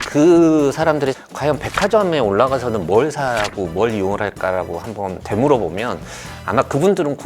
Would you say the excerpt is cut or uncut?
cut